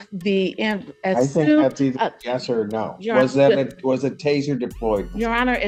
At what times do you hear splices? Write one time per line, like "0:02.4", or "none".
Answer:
none